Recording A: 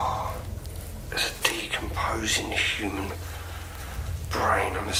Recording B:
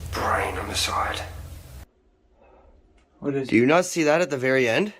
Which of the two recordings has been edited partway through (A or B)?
B